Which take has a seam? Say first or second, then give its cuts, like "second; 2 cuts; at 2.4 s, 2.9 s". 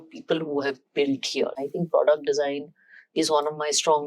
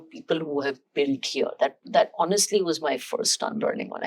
first; 1 cut; at 1.6 s